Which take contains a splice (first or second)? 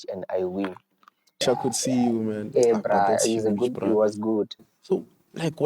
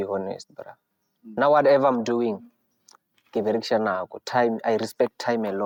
first